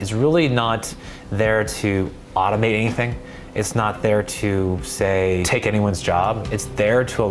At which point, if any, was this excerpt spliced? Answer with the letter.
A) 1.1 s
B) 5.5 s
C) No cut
B